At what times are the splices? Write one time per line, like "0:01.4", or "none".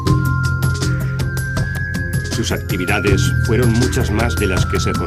0:03.4